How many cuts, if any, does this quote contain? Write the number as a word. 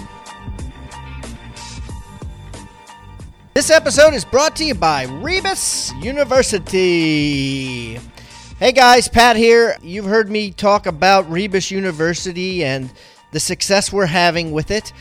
two